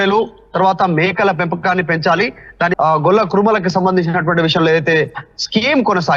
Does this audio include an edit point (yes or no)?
yes